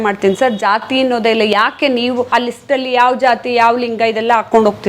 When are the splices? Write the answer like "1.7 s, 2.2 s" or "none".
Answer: 2.3 s